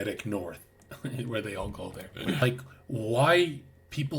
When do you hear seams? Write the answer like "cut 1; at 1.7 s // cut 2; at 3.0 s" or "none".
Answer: cut 1; at 2.4 s